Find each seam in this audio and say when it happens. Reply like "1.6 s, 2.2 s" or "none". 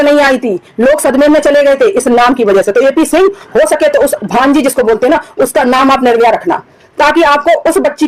none